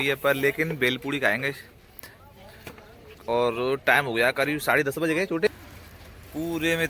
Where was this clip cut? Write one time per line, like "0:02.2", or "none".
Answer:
0:05.5